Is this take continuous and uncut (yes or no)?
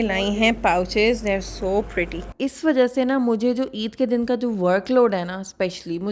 no